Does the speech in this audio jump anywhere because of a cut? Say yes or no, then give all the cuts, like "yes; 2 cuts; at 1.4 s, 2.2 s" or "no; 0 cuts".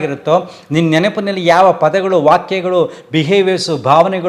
no; 0 cuts